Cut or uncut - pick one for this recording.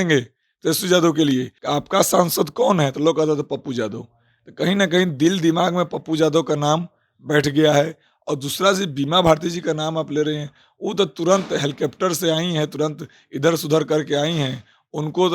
cut